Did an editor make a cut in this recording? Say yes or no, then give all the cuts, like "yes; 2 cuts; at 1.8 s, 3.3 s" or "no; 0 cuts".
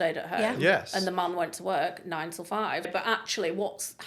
yes; 1 cut; at 2.9 s